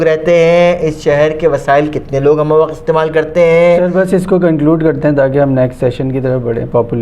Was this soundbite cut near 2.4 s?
no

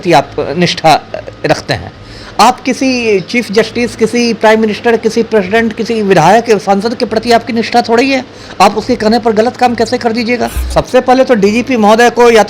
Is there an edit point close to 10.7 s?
yes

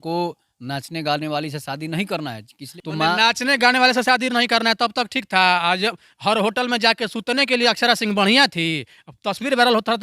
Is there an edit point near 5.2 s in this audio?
no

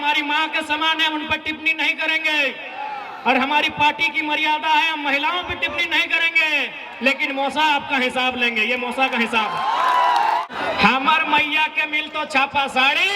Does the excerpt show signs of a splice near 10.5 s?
yes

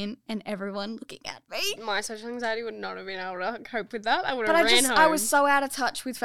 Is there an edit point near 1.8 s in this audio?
yes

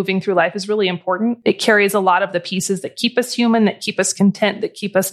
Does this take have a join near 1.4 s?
yes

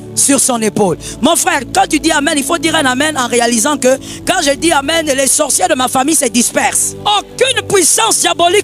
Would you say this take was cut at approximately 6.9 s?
yes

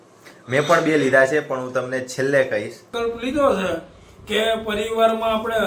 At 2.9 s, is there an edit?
yes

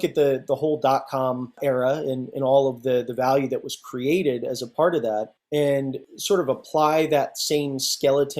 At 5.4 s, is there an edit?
yes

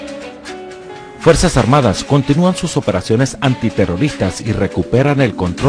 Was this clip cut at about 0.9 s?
yes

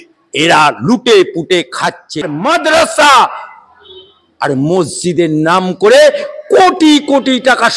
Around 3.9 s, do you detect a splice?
no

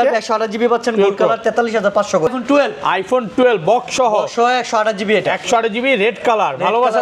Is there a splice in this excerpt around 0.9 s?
no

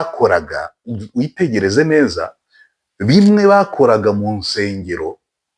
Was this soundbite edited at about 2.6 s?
no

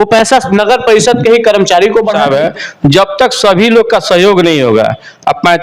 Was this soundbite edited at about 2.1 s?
yes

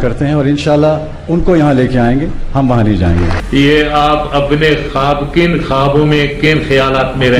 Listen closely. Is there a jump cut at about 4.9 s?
no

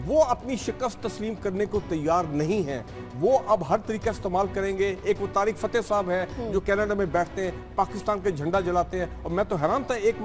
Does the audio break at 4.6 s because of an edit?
no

